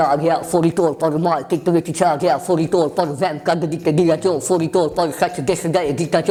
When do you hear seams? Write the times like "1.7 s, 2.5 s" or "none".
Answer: none